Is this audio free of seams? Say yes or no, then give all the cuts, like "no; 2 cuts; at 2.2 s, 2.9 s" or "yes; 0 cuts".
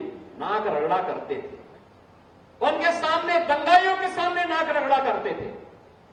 yes; 0 cuts